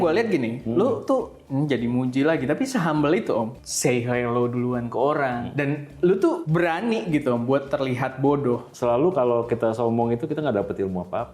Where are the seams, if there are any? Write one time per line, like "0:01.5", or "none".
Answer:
0:03.5
0:05.5
0:06.4
0:08.7